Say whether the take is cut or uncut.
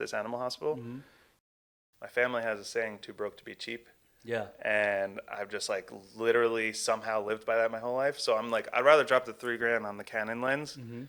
cut